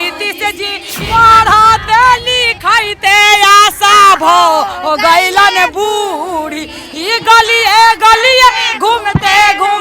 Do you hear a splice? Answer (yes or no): yes